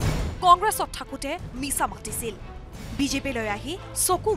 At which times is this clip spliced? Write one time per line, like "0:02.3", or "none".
none